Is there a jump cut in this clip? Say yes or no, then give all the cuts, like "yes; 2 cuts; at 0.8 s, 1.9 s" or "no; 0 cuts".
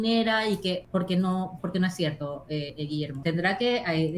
yes; 2 cuts; at 0.8 s, 3.2 s